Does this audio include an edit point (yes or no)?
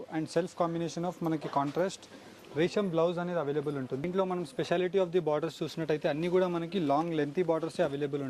yes